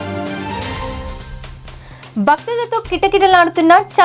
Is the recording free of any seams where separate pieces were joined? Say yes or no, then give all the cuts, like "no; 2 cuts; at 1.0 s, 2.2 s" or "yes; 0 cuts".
no; 1 cut; at 1.6 s